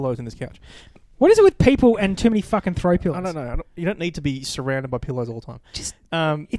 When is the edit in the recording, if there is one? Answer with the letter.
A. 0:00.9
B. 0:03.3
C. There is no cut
A